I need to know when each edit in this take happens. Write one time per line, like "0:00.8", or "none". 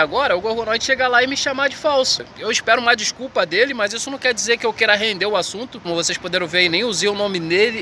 0:02.2
0:05.8